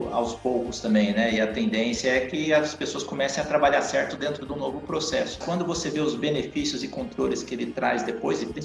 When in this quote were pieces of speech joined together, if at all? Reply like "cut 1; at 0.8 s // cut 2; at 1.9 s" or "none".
cut 1; at 5.4 s